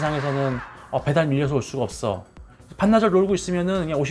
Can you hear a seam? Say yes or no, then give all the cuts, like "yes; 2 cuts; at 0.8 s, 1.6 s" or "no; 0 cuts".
no; 0 cuts